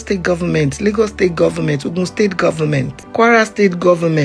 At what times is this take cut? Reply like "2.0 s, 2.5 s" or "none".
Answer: 3.0 s